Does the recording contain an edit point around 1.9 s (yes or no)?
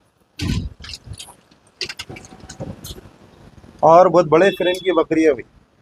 no